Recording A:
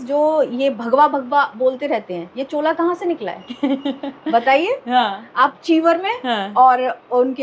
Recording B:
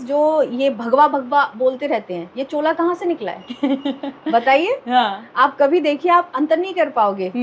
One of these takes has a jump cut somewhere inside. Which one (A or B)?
A